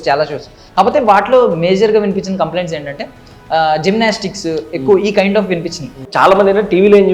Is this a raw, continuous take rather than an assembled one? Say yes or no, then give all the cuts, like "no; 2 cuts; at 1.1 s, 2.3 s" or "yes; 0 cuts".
no; 1 cut; at 6.0 s